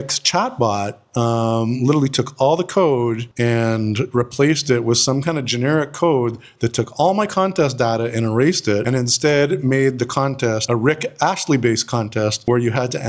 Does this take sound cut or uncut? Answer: uncut